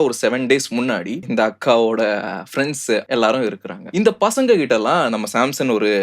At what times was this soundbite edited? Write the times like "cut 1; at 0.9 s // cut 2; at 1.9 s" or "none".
cut 1; at 3.0 s